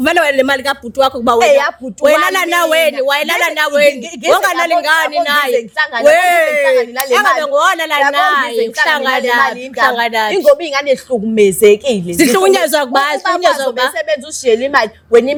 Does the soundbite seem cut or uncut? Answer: uncut